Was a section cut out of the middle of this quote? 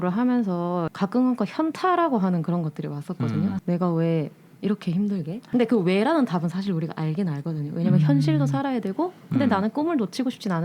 yes; 3 cuts; at 0.9 s, 3.6 s, 5.4 s

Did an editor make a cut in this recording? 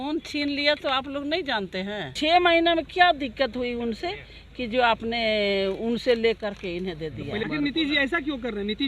yes; 2 cuts; at 2.1 s, 7.4 s

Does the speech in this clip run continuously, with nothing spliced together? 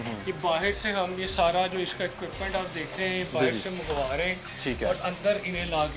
yes; 0 cuts

